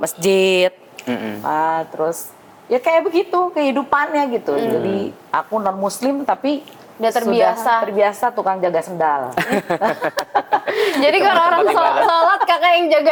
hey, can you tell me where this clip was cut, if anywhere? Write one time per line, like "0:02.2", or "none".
none